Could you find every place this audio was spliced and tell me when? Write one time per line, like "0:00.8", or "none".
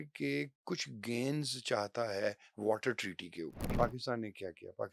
0:03.7